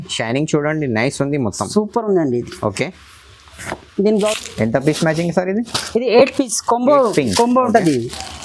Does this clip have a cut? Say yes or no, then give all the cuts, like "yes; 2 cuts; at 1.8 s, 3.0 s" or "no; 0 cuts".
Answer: yes; 1 cut; at 4.1 s